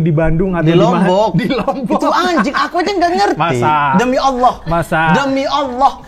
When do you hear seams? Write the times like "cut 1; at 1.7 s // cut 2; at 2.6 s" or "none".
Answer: none